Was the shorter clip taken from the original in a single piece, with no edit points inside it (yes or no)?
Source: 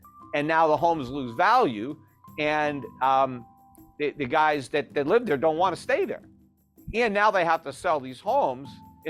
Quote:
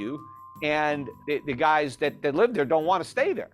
no